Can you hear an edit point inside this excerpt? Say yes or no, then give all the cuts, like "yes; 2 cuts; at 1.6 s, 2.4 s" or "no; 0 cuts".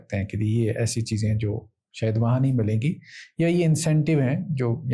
no; 0 cuts